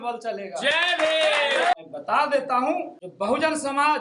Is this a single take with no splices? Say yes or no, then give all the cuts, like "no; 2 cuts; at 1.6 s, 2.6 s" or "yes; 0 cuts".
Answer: no; 2 cuts; at 1.8 s, 3.0 s